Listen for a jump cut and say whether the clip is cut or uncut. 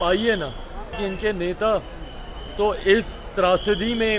cut